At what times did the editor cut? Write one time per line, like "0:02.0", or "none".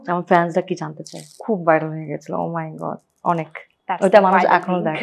0:01.4

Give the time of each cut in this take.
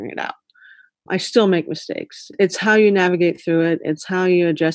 0:01.0
0:02.2

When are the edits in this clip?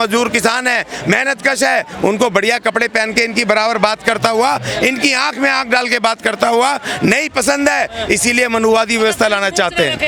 none

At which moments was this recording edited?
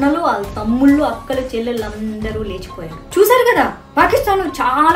0:03.0

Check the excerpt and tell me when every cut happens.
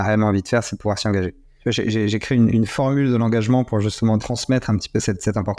0:01.4
0:04.2

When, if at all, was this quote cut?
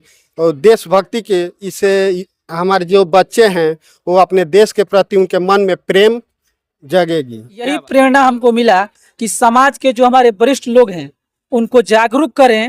0:07.7

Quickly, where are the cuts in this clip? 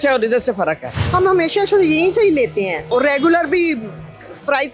0:00.9
0:02.9

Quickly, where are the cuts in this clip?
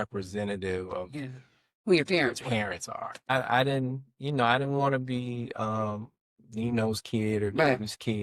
0:03.3

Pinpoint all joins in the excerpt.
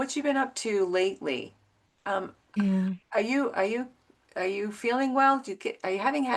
none

